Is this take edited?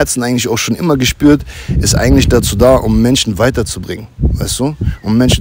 no; 0 cuts

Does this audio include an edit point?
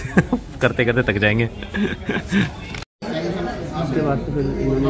no; 0 cuts

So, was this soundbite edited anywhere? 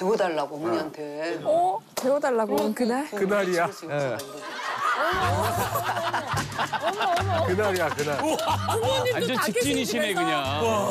no; 0 cuts

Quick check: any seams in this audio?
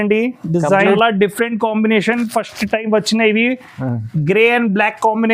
yes; 1 cut; at 1.0 s

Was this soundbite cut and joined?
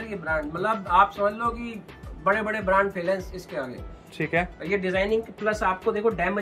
no; 0 cuts

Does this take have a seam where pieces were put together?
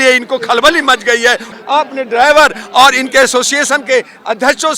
yes; 1 cut; at 1.5 s

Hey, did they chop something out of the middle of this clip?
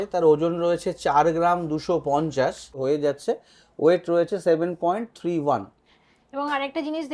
yes; 1 cut; at 2.8 s

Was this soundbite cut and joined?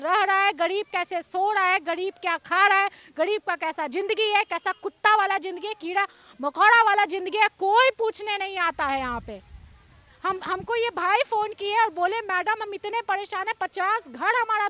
no; 0 cuts

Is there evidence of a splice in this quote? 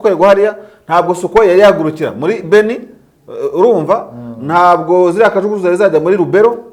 no; 0 cuts

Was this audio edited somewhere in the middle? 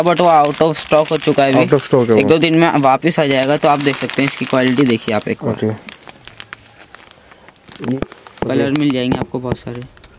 yes; 1 cut; at 7.8 s

